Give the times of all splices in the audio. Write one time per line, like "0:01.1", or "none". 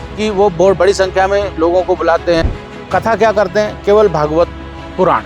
0:02.4